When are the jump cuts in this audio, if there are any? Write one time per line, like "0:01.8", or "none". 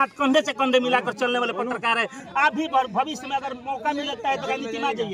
0:02.2